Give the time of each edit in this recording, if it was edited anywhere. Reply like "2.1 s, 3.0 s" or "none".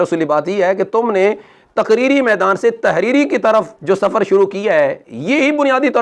none